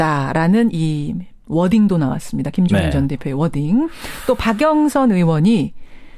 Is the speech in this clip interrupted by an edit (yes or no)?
yes